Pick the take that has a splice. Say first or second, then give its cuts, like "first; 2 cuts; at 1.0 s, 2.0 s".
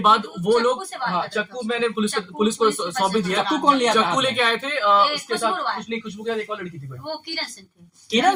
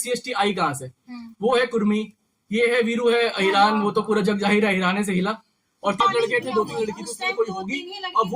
second; 1 cut; at 6.0 s